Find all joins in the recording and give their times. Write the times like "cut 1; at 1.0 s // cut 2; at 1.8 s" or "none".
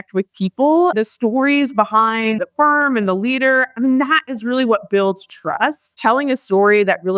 cut 1; at 0.9 s // cut 2; at 2.4 s // cut 3; at 5.9 s